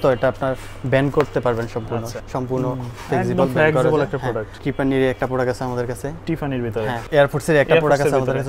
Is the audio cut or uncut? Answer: cut